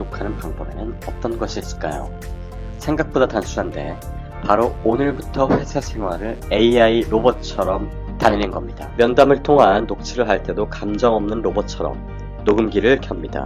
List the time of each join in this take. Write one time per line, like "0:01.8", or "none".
0:08.8